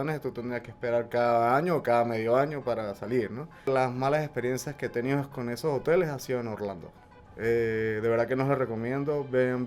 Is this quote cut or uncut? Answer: cut